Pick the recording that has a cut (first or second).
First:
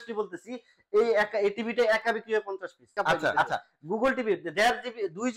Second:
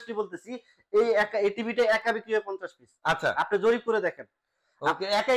first